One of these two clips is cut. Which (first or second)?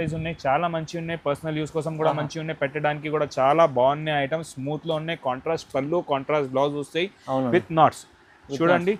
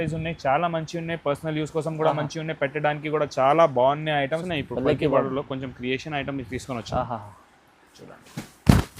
second